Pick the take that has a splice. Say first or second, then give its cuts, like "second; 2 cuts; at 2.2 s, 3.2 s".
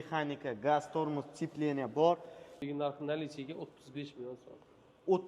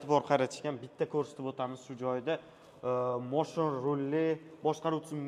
first; 1 cut; at 2.5 s